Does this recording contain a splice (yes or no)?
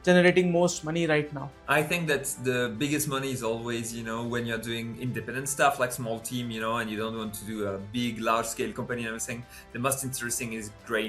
no